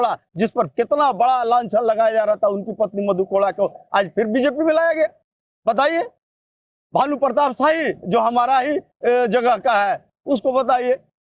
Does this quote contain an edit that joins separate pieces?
no; 0 cuts

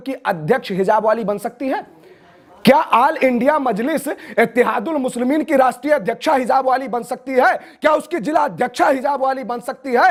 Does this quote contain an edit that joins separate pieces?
no; 0 cuts

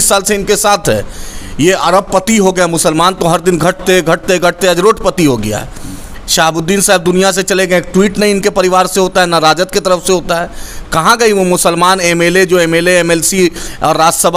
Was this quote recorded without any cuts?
yes; 0 cuts

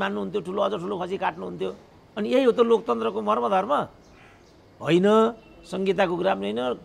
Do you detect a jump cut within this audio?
no; 0 cuts

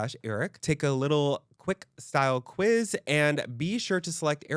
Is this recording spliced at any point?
no; 0 cuts

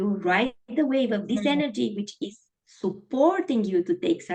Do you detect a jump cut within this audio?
no; 0 cuts

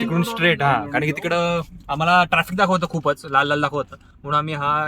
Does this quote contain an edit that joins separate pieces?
no; 0 cuts

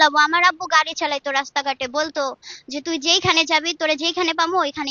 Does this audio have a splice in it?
no; 0 cuts

